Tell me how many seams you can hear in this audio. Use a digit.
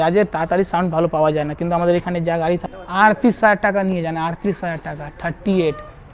1